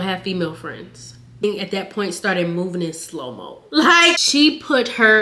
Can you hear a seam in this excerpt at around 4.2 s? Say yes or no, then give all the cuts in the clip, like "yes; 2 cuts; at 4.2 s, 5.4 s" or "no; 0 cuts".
yes; 2 cuts; at 1.4 s, 4.2 s